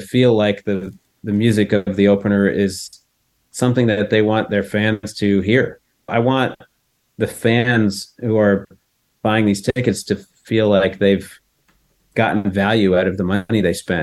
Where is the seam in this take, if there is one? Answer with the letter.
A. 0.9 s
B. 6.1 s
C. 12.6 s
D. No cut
B